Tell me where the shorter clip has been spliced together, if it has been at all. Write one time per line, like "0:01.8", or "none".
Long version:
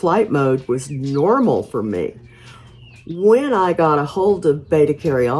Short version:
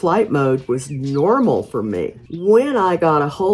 0:02.2